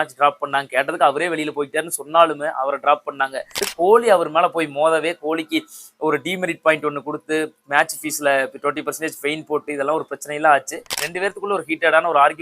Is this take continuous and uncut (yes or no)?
no